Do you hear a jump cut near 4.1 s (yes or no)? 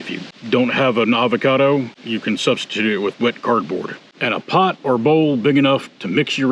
no